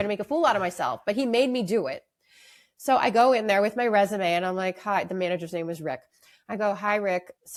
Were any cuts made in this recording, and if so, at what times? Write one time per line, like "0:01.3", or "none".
none